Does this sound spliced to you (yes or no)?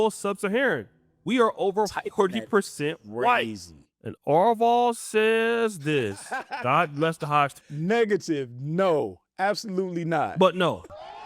yes